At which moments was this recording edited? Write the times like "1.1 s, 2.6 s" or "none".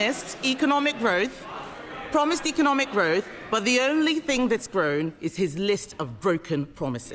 none